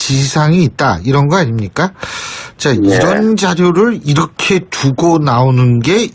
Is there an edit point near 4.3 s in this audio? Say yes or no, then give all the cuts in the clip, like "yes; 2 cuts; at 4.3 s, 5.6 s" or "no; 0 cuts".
no; 1 cut; at 2.3 s